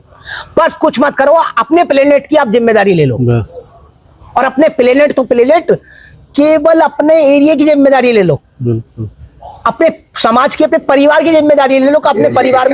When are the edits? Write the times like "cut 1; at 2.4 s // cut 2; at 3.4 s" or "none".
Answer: none